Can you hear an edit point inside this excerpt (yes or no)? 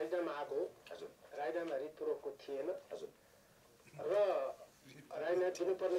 no